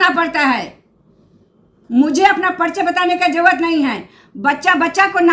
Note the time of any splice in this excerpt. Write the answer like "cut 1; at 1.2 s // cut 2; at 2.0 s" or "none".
none